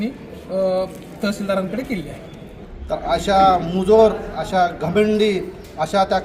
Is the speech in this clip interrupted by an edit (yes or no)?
yes